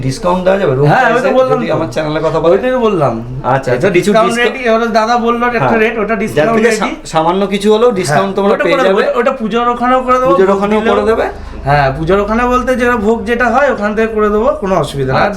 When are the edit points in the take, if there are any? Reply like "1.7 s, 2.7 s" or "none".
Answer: none